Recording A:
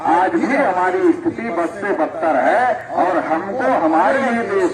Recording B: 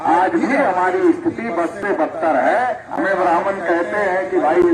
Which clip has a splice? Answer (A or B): B